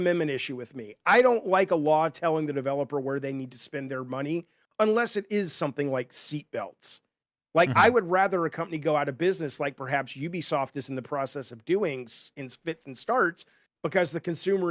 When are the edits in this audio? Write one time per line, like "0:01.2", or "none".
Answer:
none